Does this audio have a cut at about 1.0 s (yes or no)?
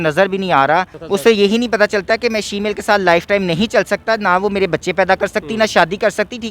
yes